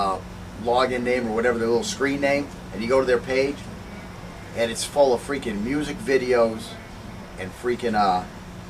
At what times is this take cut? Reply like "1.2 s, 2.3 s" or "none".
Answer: 5.2 s